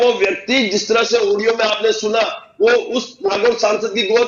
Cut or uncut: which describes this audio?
uncut